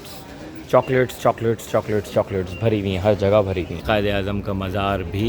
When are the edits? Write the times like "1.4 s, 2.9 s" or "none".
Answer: 3.8 s